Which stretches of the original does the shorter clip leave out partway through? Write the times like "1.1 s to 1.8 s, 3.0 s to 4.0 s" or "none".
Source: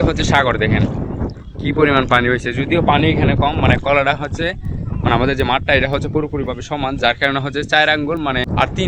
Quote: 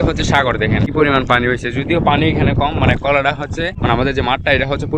0.9 s to 1.7 s, 4.6 s to 5.0 s

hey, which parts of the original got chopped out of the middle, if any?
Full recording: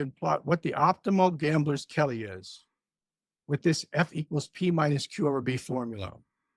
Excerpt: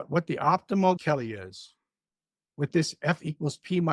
1.4 s to 1.9 s

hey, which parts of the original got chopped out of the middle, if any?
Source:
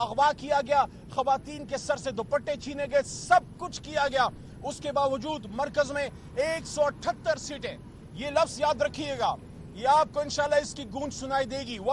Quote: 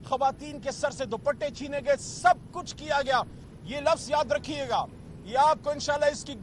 4.5 s to 7.9 s

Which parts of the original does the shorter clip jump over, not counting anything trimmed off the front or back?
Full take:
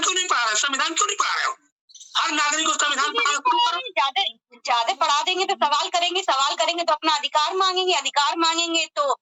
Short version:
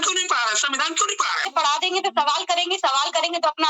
1.5 s to 4.9 s

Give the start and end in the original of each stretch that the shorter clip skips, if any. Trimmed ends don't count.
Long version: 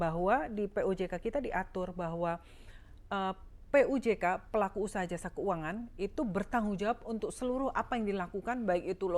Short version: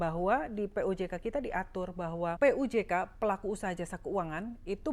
2.4 s to 3.7 s

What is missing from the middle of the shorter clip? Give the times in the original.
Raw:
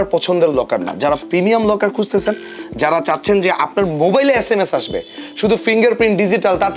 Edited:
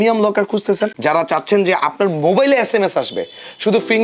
2.4 s to 2.7 s

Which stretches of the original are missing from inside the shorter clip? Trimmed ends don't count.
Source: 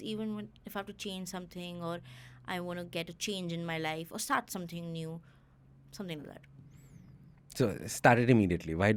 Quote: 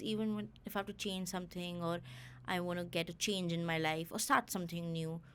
none

